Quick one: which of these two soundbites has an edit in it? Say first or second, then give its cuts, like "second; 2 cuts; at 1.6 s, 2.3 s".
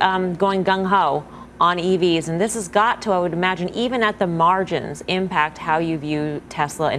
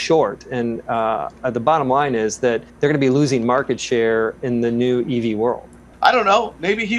second; 2 cuts; at 2.7 s, 5.8 s